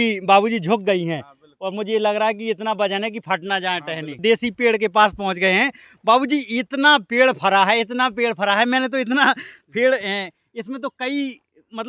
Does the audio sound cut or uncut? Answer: cut